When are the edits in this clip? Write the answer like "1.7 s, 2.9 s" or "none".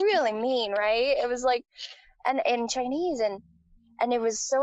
none